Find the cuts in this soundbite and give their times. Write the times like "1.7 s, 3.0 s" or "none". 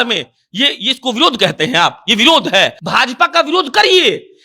2.8 s